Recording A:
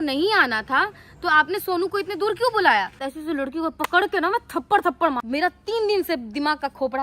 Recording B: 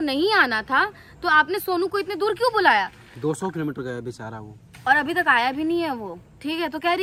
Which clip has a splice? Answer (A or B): A